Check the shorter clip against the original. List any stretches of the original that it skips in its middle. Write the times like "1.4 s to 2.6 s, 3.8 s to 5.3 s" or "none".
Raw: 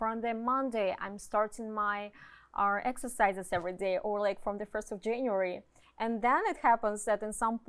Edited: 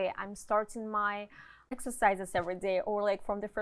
2.6 s to 2.9 s